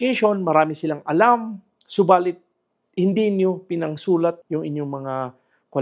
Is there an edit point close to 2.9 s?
no; 1 cut; at 4.4 s

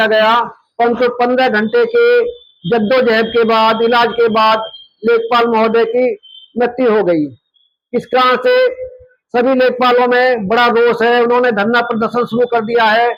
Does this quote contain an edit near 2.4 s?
no; 0 cuts

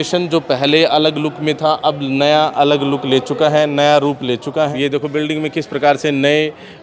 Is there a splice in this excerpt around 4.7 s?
yes; 1 cut; at 4.7 s

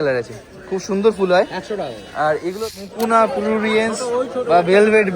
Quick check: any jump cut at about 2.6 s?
yes; 1 cut; at 2.6 s

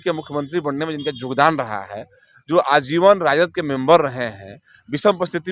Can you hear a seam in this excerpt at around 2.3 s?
no; 0 cuts

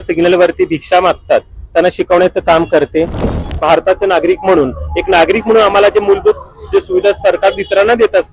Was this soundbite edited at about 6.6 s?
no; 1 cut; at 3.3 s

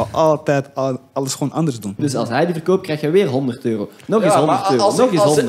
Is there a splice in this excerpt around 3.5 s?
no; 1 cut; at 2.0 s

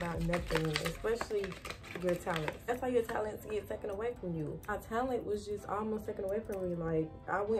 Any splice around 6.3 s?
no; 2 cuts; at 2.7 s, 4.7 s

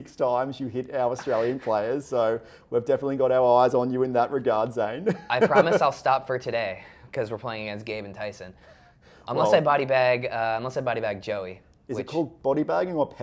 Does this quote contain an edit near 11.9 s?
no; 0 cuts

